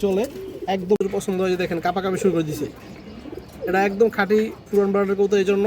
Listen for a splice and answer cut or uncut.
cut